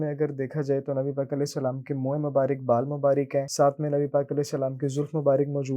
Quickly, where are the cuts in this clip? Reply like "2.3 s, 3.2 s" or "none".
3.5 s